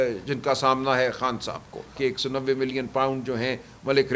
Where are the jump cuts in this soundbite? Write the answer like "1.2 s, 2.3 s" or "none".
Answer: 2.0 s